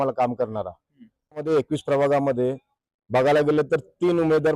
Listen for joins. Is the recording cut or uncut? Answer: cut